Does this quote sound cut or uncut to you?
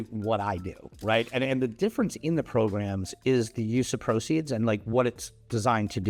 uncut